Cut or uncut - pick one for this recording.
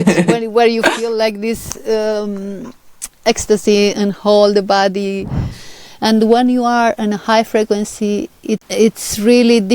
cut